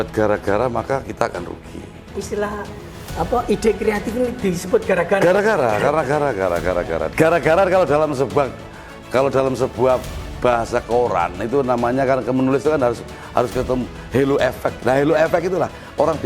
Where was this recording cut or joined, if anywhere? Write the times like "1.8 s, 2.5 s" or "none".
2.1 s